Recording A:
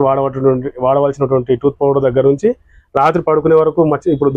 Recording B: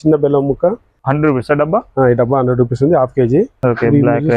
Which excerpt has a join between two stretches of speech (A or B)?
B